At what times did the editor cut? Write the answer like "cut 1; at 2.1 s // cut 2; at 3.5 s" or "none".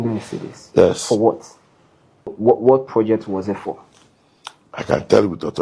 cut 1; at 2.4 s